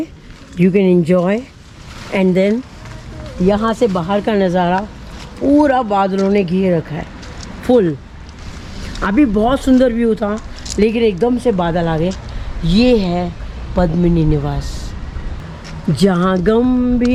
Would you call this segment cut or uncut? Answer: uncut